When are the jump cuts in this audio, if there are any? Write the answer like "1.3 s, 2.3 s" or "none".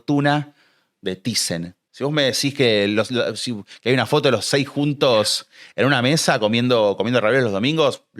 1.8 s